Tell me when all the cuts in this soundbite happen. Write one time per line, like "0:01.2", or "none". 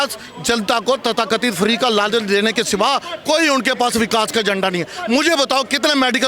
none